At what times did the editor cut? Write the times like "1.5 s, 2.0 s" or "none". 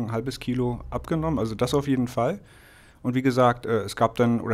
none